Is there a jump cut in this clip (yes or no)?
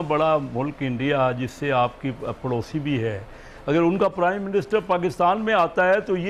no